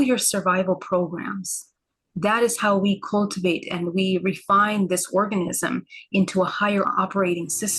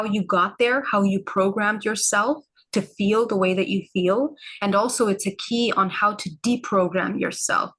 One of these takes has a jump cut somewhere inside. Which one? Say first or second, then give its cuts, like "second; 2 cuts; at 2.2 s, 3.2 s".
first; 1 cut; at 6.9 s